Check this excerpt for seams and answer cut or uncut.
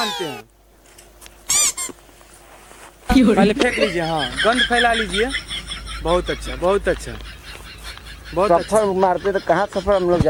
uncut